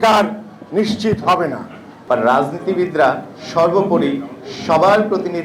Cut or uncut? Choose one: cut